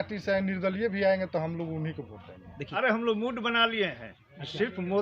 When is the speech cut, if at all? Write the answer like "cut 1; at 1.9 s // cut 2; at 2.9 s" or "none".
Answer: cut 1; at 2.6 s